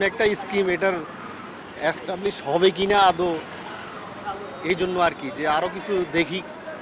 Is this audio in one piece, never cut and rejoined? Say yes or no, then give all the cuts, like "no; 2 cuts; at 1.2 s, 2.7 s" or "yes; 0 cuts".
yes; 0 cuts